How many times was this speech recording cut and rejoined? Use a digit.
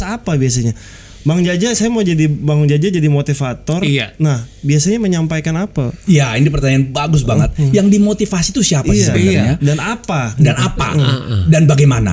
0